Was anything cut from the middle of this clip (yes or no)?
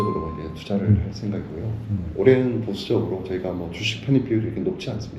no